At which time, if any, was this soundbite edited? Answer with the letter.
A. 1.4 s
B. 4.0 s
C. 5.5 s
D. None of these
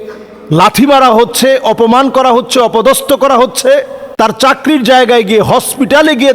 B